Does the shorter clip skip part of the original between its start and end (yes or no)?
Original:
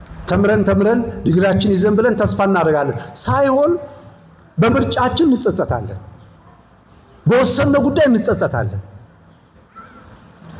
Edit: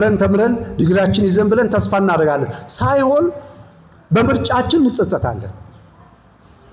no